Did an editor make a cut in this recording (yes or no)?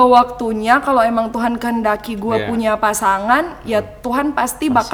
no